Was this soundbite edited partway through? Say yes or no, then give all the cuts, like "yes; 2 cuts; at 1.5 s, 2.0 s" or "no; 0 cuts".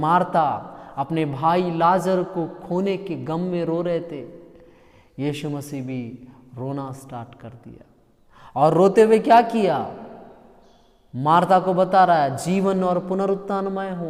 no; 0 cuts